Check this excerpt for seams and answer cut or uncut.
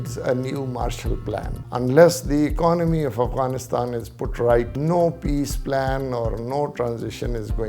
cut